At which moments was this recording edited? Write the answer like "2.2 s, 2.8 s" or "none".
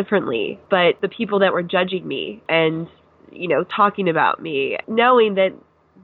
0.9 s, 2.3 s, 4.8 s